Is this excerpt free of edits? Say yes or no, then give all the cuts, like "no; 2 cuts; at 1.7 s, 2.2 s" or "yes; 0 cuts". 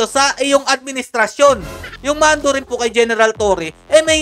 no; 1 cut; at 1.9 s